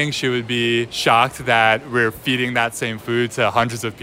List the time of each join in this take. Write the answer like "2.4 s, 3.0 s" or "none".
0.9 s